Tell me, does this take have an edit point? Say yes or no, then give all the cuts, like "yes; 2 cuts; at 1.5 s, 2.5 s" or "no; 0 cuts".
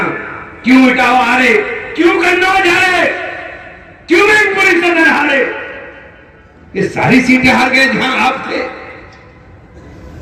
no; 0 cuts